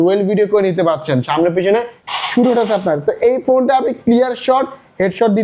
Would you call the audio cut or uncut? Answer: cut